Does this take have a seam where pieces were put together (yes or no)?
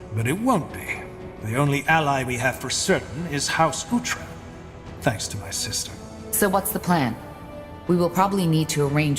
yes